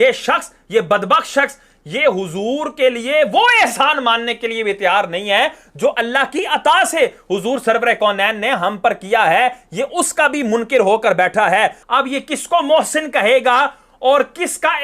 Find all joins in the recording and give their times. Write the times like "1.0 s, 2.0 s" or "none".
11.8 s